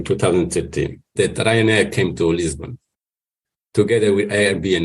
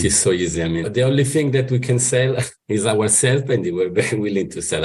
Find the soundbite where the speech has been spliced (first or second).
first